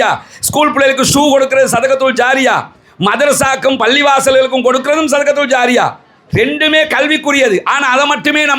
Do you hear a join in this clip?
no; 0 cuts

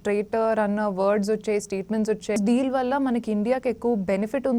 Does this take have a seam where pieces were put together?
yes; 1 cut; at 2.4 s

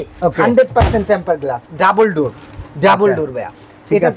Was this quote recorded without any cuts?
yes; 0 cuts

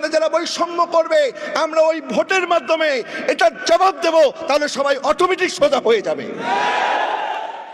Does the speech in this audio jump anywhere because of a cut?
no; 0 cuts

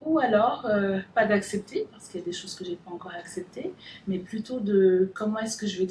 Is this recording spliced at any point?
no; 0 cuts

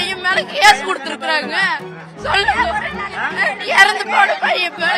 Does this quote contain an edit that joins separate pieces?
no; 0 cuts

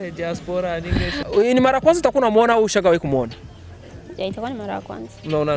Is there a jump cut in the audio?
yes; 1 cut; at 1.2 s

